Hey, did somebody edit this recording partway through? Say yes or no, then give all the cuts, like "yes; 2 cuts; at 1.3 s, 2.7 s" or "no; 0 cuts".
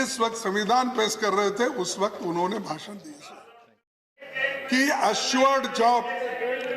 yes; 1 cut; at 4.1 s